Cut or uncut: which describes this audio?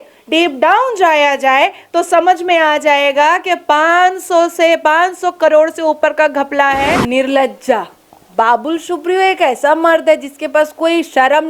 cut